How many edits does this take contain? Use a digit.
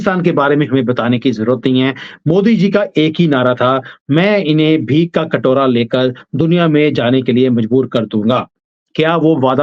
0